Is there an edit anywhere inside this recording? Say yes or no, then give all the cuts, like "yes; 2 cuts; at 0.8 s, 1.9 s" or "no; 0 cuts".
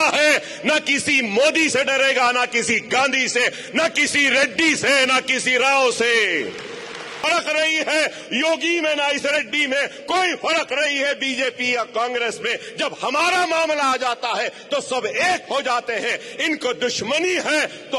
yes; 1 cut; at 7.3 s